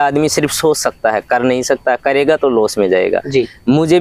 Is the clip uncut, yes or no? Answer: yes